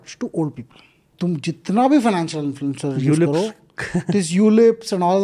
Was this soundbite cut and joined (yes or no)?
no